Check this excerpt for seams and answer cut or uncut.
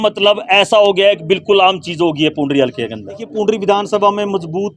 cut